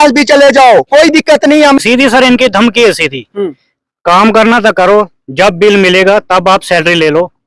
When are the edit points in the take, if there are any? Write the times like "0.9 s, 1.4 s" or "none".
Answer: 1.8 s